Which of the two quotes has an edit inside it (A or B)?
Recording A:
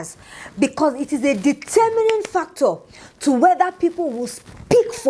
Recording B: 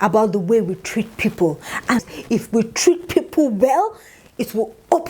B